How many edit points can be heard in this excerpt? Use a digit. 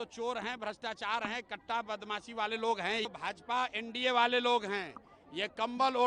1